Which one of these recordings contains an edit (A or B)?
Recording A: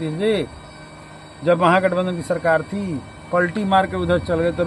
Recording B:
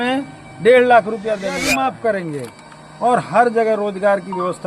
B